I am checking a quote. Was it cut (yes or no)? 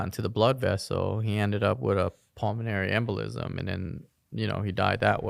no